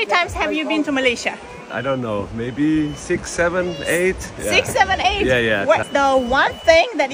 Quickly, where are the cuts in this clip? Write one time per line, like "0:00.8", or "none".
none

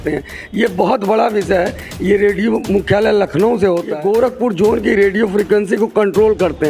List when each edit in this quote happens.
0:03.9

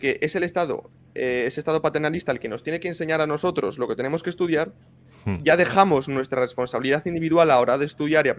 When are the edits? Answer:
none

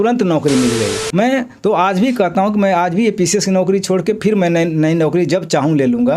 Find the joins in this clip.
0:01.0

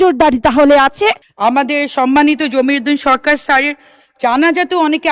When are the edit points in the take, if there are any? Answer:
0:01.3

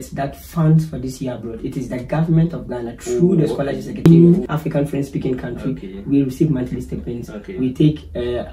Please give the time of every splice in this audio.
0:04.0

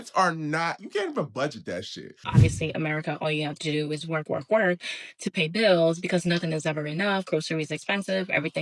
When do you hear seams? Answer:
0:02.2

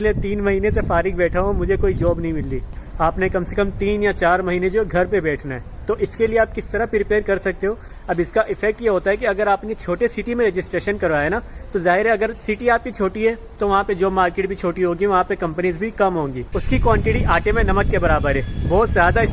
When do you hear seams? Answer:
0:02.8
0:07.9
0:16.5

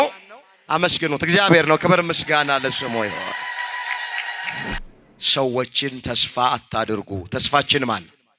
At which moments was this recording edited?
0:04.8

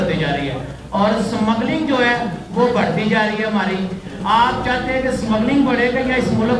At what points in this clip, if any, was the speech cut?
none

